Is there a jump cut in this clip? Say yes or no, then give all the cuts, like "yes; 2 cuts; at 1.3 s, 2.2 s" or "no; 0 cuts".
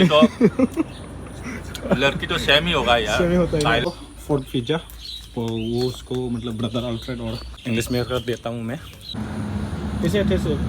yes; 3 cuts; at 3.9 s, 7.5 s, 9.2 s